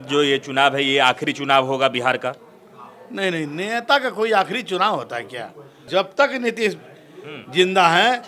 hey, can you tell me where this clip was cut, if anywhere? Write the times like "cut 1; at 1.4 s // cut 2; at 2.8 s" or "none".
cut 1; at 5.9 s